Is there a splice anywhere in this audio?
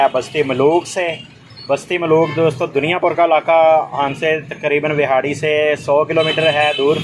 no; 0 cuts

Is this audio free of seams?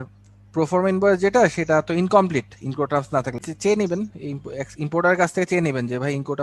no; 1 cut; at 3.4 s

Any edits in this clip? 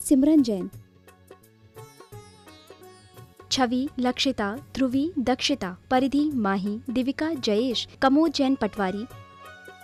no; 0 cuts

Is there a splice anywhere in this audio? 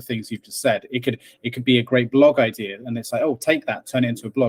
no; 0 cuts

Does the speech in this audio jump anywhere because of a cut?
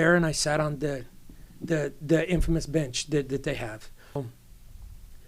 yes; 1 cut; at 4.2 s

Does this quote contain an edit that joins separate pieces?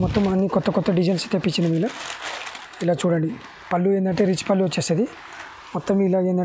no; 0 cuts

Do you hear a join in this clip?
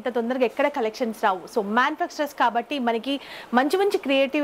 no; 0 cuts

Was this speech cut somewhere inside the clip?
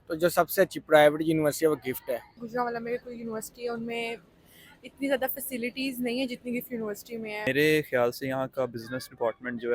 yes; 2 cuts; at 2.4 s, 7.5 s

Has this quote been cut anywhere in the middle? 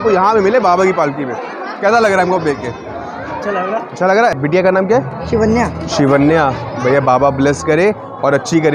yes; 1 cut; at 4.4 s

